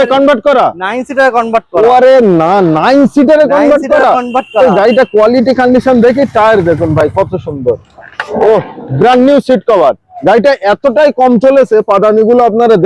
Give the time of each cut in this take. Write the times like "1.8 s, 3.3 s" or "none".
none